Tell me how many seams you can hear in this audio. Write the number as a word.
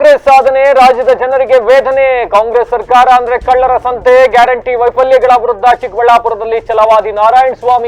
zero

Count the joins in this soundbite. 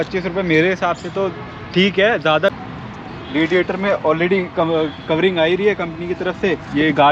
one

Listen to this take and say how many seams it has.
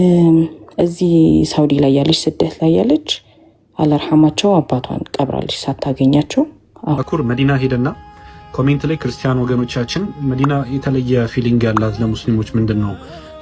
one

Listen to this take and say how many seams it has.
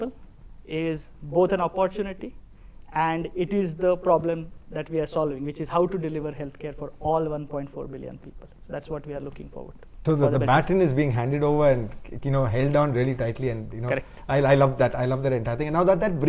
zero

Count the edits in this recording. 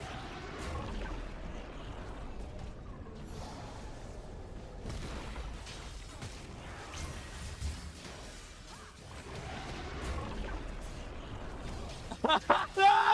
three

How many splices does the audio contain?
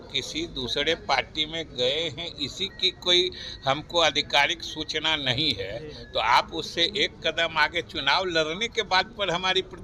zero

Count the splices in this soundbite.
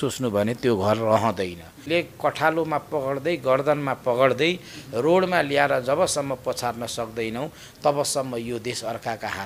one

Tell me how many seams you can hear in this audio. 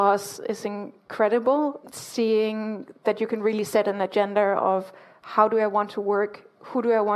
zero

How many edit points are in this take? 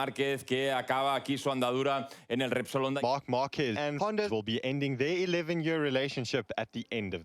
two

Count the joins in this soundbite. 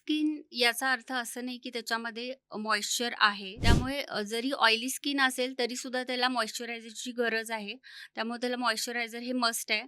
one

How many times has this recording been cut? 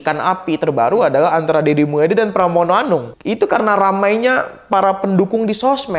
one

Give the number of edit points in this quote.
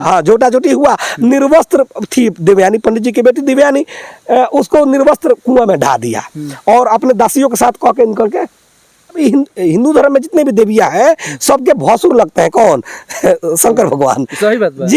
one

